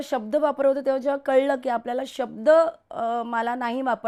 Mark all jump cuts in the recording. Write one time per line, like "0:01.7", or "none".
none